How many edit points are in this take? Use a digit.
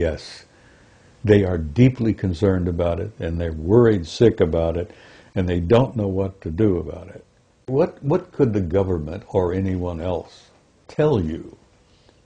1